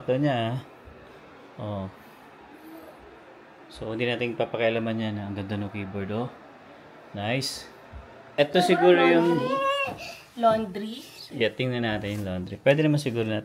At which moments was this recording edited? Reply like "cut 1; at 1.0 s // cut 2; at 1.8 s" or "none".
cut 1; at 8.2 s

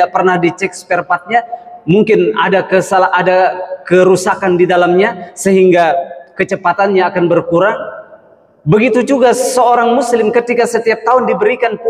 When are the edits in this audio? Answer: none

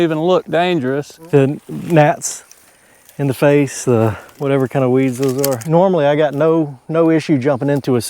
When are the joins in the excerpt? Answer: cut 1; at 1.1 s // cut 2; at 4.2 s // cut 3; at 5.6 s

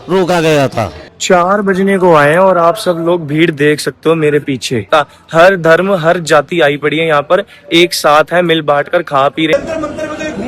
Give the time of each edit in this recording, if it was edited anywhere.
cut 1; at 1.1 s // cut 2; at 4.9 s // cut 3; at 9.5 s

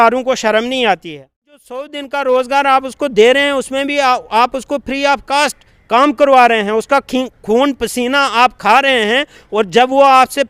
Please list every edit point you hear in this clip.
cut 1; at 1.9 s

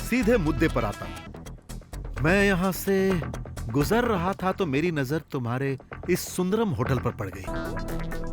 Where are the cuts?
cut 1; at 1.3 s // cut 2; at 7.5 s

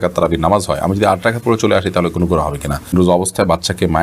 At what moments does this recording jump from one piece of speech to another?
cut 1; at 2.9 s

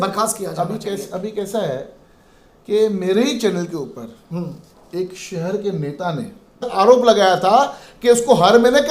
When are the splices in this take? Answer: cut 1; at 6.7 s

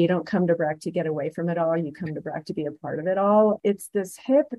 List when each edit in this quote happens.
cut 1; at 3.6 s

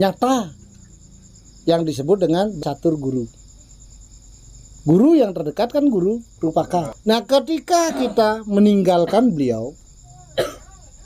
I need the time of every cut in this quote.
cut 1; at 2.6 s // cut 2; at 6.9 s

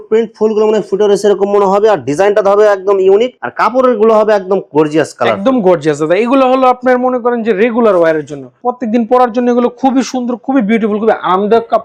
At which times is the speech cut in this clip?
none

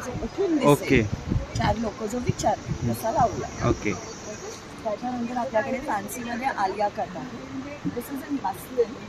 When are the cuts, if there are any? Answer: none

